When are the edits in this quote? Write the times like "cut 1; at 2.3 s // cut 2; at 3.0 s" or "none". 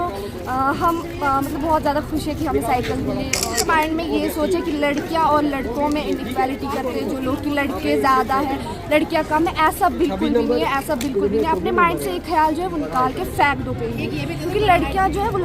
cut 1; at 3.5 s